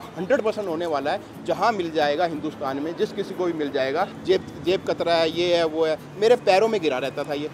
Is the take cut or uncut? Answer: cut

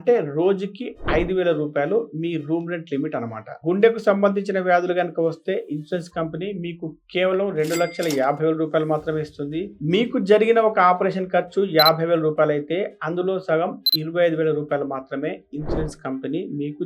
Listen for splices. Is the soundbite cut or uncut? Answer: cut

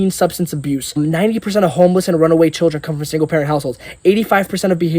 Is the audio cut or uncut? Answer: cut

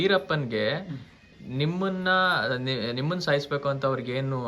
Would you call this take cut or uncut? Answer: uncut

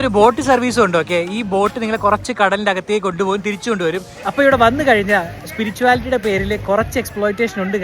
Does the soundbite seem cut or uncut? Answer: cut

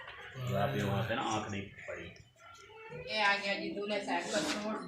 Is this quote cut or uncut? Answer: cut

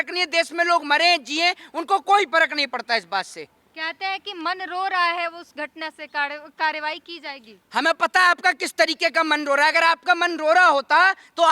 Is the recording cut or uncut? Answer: uncut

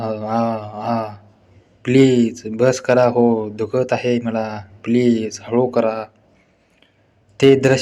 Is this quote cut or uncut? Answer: uncut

